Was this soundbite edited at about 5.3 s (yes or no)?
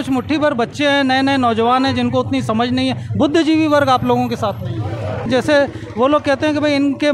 yes